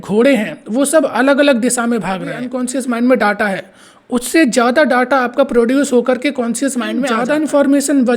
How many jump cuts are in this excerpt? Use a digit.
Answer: 2